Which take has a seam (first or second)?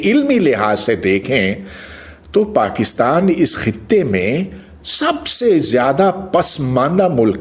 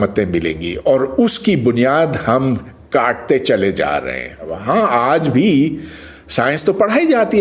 second